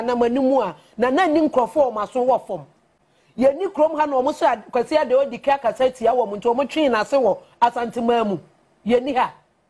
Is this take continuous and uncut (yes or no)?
yes